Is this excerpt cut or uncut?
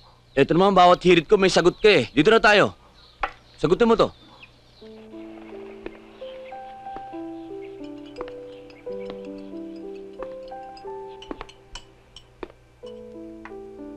uncut